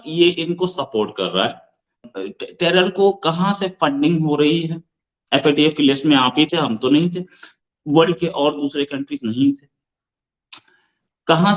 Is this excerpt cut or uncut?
cut